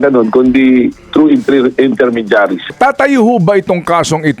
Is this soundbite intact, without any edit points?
no; 1 cut; at 2.7 s

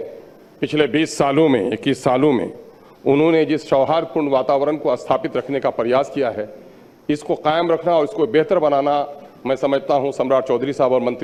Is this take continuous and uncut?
yes; 0 cuts

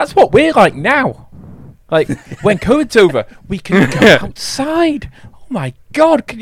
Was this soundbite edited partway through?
no; 0 cuts

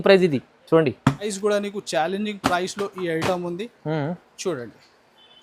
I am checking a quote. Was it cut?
yes; 1 cut; at 1.3 s

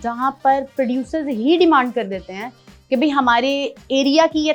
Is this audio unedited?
yes; 0 cuts

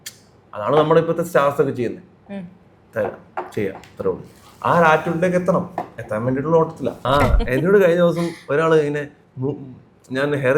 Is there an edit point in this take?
yes; 1 cut; at 7.0 s

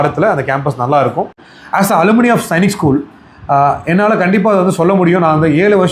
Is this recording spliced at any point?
yes; 1 cut; at 1.5 s

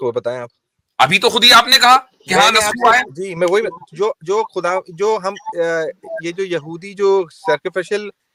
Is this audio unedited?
yes; 0 cuts

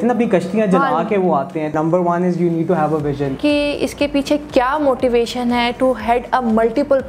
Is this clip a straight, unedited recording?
no; 2 cuts; at 1.7 s, 3.3 s

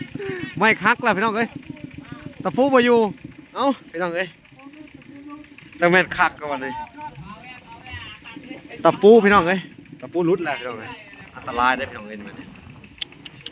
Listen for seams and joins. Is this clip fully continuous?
yes; 0 cuts

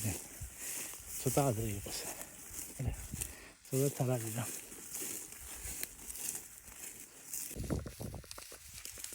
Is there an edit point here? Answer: yes; 1 cut; at 7.5 s

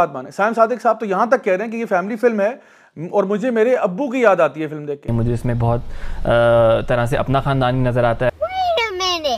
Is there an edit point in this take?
yes; 1 cut; at 5.1 s

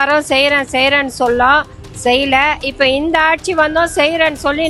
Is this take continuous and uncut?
yes; 0 cuts

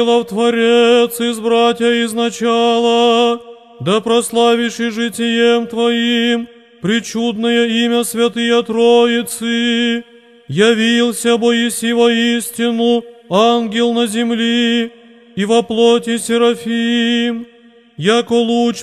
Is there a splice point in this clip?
no; 0 cuts

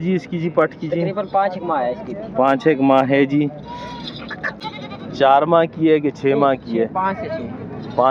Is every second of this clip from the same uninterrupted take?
no; 1 cut; at 4.6 s

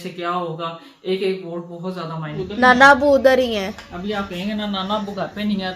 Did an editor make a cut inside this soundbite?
yes; 1 cut; at 2.4 s

